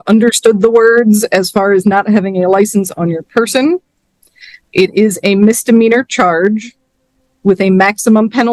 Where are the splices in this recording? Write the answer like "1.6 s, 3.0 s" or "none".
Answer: none